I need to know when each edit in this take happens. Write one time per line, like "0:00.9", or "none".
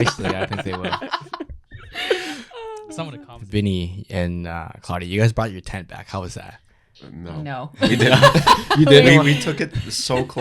0:03.0